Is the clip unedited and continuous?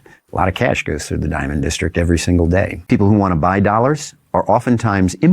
no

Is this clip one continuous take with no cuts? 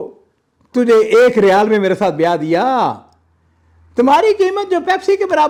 yes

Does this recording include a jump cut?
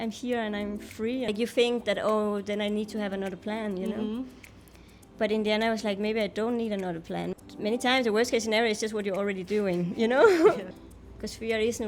yes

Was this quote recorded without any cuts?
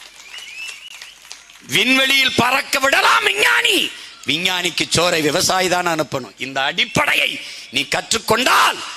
yes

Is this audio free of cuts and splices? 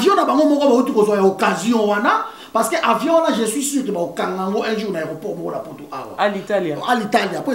yes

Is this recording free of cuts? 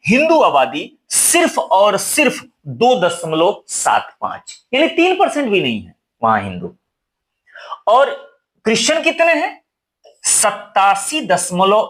yes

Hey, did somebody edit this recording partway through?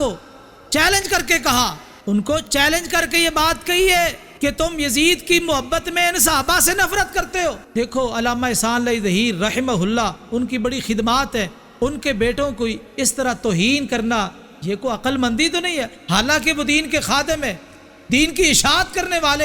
yes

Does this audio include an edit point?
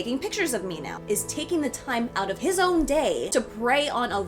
yes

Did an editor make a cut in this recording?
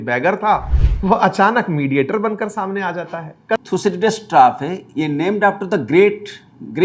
yes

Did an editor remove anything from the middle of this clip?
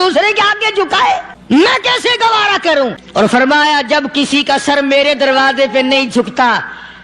yes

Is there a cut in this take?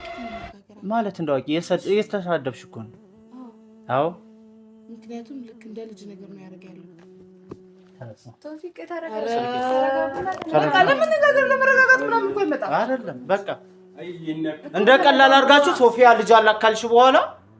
no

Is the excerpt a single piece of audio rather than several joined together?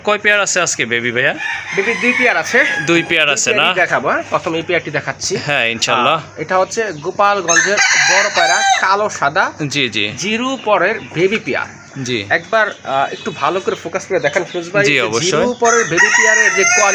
yes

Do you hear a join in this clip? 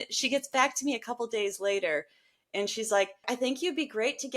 yes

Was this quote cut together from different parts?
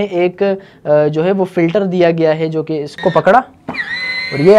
yes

